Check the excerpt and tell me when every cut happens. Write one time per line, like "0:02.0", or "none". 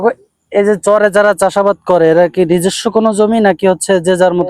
none

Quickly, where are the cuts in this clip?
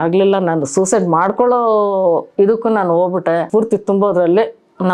0:03.5

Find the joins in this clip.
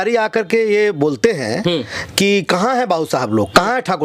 none

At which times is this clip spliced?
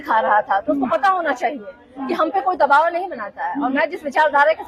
none

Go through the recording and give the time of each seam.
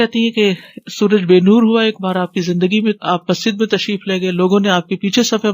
none

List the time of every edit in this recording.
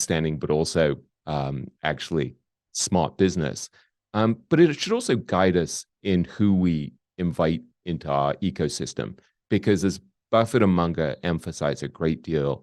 none

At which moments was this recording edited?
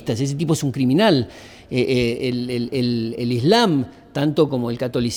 none

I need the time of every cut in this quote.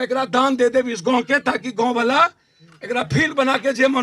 none

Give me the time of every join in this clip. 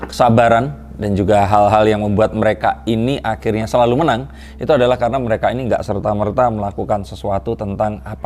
none

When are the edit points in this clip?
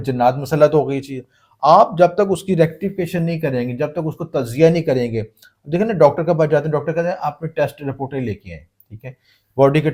none

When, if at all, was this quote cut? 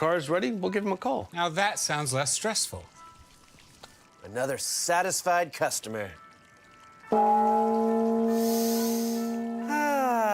none

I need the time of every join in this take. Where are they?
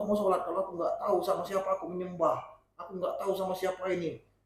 none

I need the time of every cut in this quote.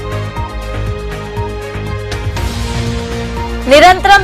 0:02.2

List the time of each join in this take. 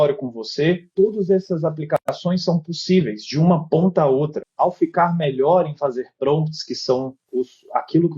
0:04.5

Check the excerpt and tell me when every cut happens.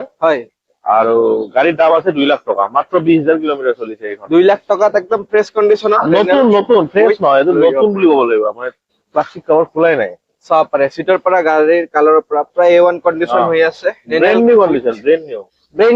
none

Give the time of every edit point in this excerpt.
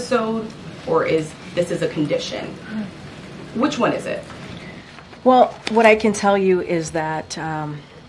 none

